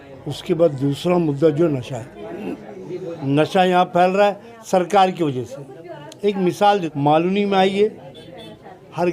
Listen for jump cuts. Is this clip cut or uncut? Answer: cut